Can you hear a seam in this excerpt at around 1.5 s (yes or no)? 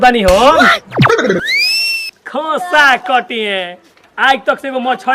yes